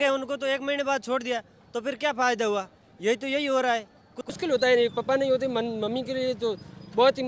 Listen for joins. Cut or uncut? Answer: cut